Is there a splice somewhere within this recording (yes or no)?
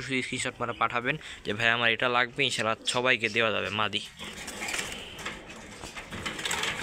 no